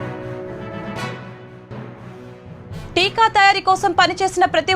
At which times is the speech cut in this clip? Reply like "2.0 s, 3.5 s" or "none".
2.7 s